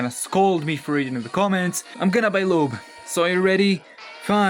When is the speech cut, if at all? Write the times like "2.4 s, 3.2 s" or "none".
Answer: 1.8 s